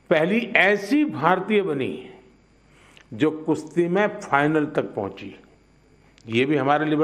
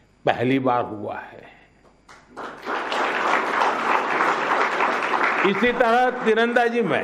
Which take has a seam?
first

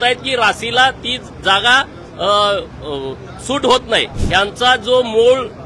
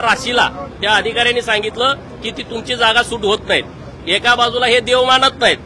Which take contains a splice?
first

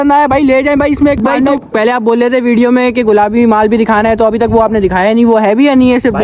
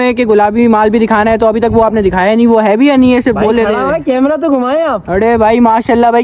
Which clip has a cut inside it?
first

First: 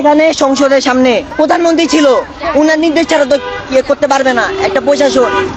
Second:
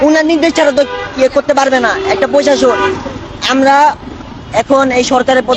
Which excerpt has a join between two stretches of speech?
first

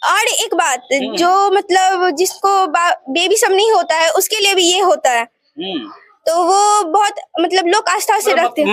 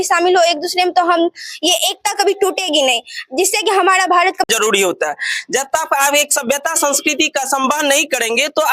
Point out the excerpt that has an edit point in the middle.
second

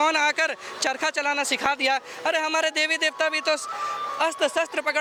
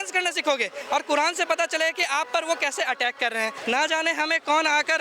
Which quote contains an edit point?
second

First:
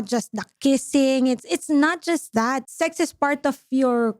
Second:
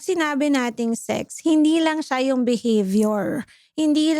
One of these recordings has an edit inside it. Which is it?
first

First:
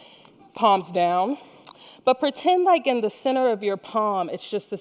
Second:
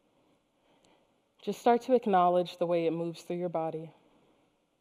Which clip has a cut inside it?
first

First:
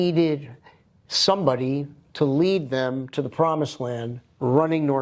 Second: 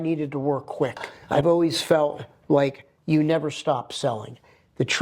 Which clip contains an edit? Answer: second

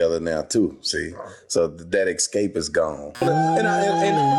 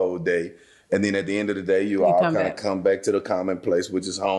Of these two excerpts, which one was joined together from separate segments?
first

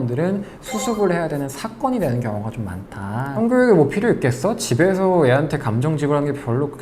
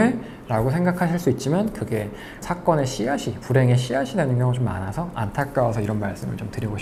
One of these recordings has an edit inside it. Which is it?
first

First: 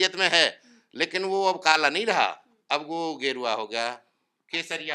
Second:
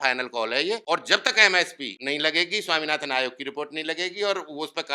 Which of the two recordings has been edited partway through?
second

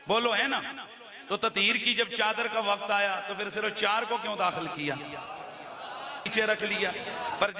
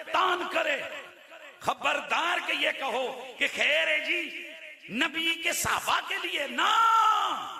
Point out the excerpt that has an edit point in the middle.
first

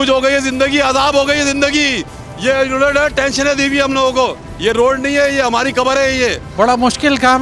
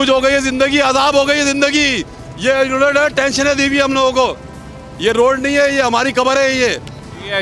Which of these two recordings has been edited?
first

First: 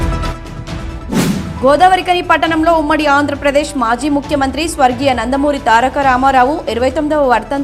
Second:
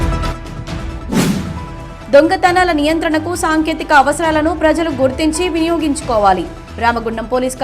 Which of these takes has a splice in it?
first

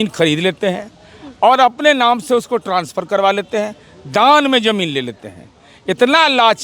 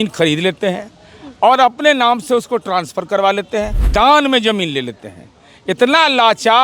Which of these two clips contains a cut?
second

